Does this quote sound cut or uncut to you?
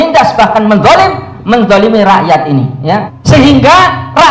cut